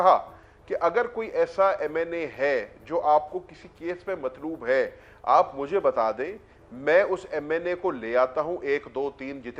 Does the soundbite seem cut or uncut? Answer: uncut